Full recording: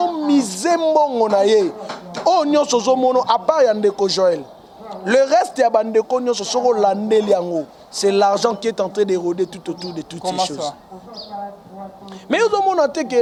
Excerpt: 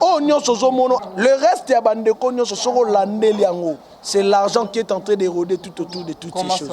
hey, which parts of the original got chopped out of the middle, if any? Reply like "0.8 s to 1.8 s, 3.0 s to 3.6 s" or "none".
3.3 s to 4.9 s